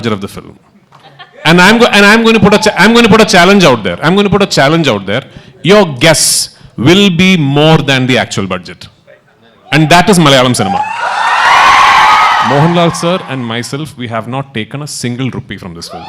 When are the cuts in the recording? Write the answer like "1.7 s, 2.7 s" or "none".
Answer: 12.4 s